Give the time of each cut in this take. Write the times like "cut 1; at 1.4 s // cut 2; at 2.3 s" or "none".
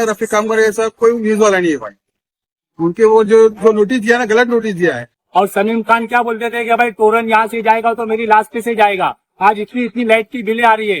cut 1; at 5.1 s